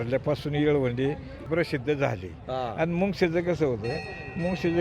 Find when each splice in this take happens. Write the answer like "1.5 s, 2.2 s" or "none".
1.4 s